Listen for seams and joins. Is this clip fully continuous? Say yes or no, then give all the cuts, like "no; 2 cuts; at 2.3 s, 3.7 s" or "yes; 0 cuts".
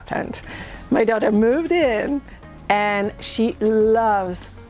yes; 0 cuts